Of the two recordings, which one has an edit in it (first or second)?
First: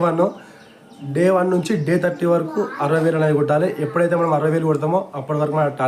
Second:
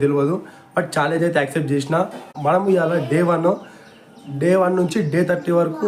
second